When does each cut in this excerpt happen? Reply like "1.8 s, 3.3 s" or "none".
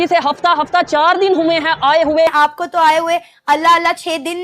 2.3 s